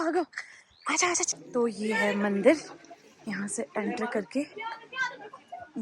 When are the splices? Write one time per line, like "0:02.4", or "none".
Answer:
0:01.3